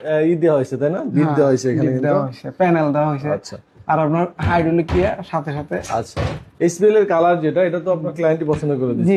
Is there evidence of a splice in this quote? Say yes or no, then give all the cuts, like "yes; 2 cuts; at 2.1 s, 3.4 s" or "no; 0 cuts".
no; 0 cuts